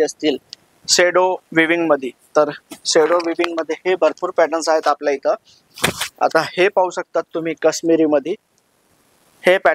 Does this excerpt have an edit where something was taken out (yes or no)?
no